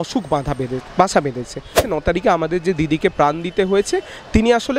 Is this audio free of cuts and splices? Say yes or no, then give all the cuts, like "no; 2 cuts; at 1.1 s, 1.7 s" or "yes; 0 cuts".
no; 1 cut; at 1.8 s